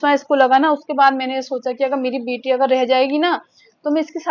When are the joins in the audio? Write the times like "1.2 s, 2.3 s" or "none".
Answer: none